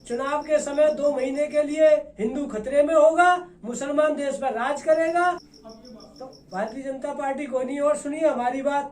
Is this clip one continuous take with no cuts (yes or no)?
no